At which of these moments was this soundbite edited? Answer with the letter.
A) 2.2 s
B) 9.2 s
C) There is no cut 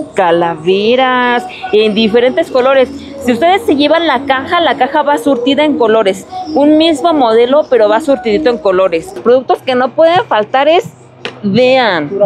B